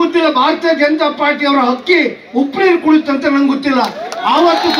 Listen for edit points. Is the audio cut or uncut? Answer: uncut